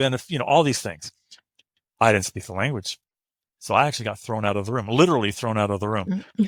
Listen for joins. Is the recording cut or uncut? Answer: uncut